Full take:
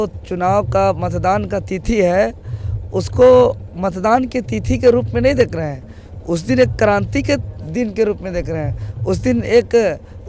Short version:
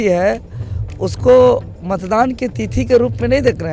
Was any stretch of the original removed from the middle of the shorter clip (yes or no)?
no